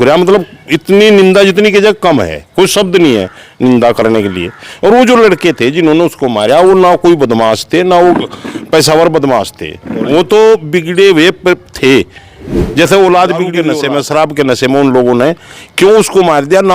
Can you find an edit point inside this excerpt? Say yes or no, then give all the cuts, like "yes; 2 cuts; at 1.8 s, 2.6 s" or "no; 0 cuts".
yes; 1 cut; at 13.6 s